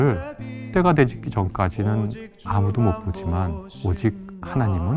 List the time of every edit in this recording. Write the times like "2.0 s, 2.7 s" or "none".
3.7 s